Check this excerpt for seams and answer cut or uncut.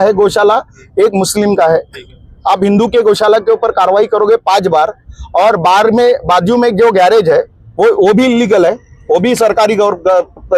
uncut